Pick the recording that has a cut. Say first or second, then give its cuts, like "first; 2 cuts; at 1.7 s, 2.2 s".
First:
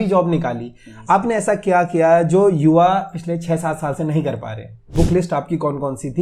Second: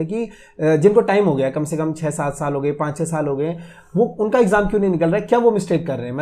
first; 1 cut; at 4.9 s